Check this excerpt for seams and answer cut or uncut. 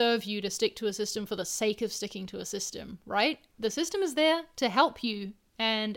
uncut